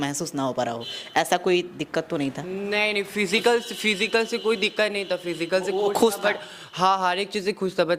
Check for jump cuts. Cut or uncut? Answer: uncut